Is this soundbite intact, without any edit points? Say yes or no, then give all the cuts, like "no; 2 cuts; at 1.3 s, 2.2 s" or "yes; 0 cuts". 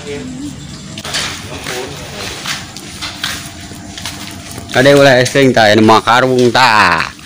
no; 1 cut; at 1.1 s